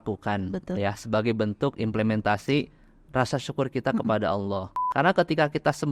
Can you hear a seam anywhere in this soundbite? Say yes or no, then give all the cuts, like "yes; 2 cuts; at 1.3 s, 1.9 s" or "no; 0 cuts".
yes; 1 cut; at 4.8 s